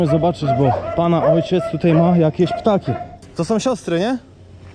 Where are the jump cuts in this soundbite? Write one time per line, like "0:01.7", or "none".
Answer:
0:03.3